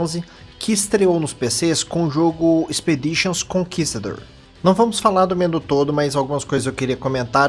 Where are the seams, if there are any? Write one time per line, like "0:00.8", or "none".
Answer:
0:03.2